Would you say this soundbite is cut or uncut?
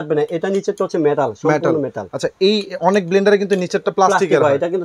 uncut